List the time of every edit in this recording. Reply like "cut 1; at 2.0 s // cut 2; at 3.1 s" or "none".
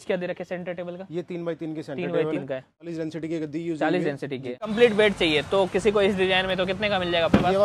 cut 1; at 2.8 s // cut 2; at 4.7 s